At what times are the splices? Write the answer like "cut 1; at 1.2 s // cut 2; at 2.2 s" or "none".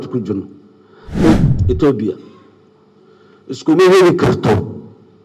cut 1; at 1.4 s